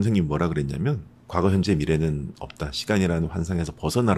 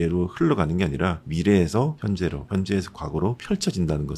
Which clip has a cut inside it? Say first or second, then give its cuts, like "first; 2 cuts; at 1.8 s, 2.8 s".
second; 3 cuts; at 1.2 s, 2.2 s, 3.4 s